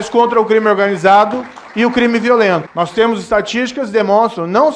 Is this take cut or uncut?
cut